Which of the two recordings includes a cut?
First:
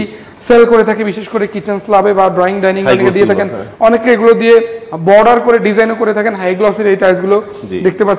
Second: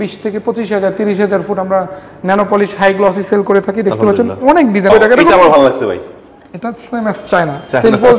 second; 1 cut; at 4.9 s

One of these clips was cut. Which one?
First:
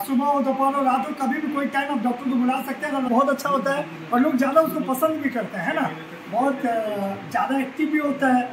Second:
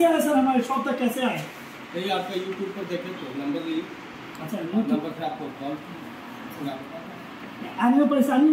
first; 1 cut; at 3.1 s

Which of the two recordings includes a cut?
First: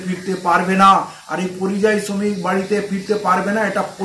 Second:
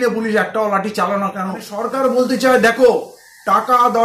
second; 1 cut; at 1.8 s

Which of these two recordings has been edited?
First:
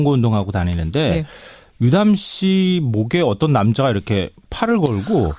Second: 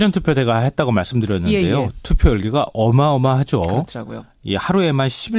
first; 1 cut; at 2.3 s

